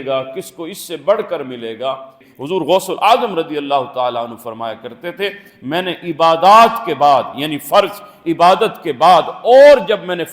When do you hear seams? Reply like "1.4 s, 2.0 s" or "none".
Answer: 2.3 s